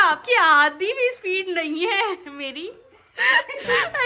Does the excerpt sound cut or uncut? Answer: uncut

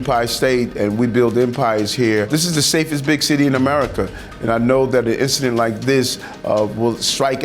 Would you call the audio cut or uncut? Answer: cut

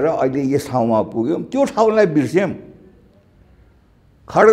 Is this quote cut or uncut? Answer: uncut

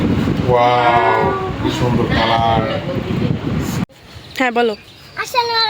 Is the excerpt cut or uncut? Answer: cut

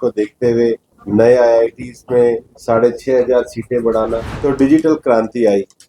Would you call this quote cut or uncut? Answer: cut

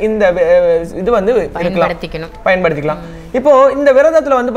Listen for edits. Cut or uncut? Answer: uncut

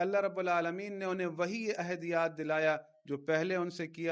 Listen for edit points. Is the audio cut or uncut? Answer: uncut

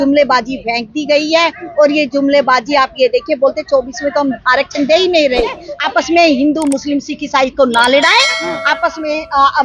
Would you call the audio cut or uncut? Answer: cut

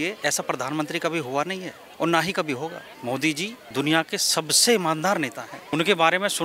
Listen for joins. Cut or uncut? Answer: cut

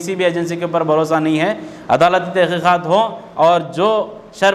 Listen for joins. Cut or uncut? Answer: uncut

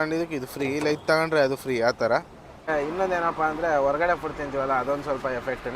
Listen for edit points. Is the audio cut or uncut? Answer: cut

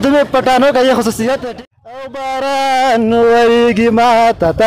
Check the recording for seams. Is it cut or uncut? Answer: cut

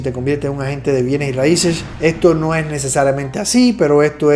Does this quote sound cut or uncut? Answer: cut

